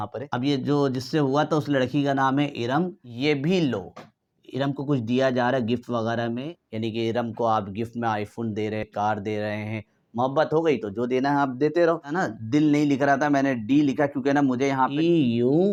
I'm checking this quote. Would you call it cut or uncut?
uncut